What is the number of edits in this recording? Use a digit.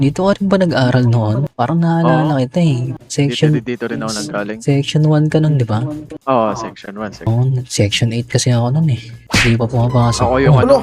2